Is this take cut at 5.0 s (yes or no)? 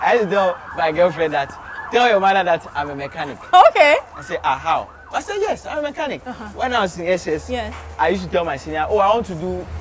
no